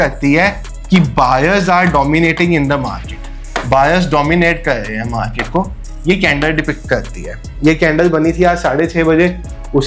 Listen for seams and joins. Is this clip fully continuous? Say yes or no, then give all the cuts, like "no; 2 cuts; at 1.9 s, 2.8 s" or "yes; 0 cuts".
yes; 0 cuts